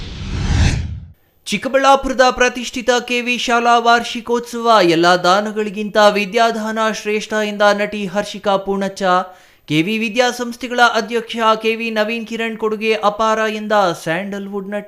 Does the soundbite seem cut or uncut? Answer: cut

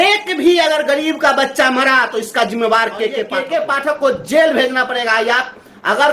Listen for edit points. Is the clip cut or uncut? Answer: cut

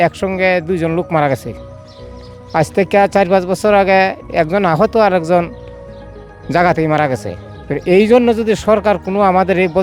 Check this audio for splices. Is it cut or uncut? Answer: uncut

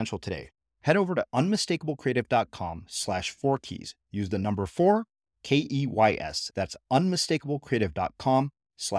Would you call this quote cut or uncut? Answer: uncut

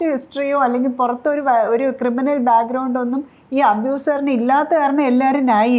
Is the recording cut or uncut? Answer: uncut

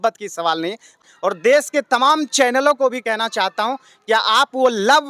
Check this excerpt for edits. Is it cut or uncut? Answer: cut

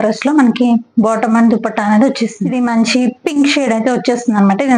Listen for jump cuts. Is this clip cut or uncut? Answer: cut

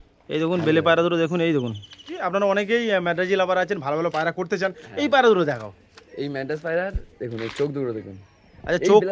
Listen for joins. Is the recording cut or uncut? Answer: cut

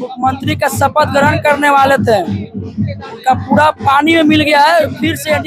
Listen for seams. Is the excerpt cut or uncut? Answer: uncut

